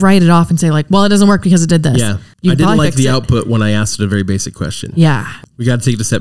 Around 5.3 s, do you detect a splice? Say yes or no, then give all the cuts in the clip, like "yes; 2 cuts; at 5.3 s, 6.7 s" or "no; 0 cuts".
yes; 2 cuts; at 2.2 s, 5.3 s